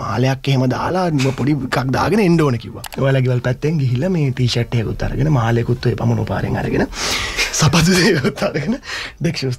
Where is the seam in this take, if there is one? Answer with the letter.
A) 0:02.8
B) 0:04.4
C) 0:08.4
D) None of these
A